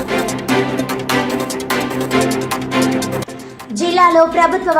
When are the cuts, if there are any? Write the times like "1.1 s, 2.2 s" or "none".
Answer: 3.1 s